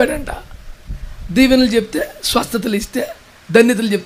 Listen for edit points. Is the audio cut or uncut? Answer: uncut